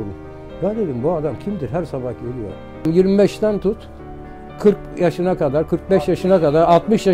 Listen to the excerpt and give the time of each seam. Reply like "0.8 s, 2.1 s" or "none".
2.9 s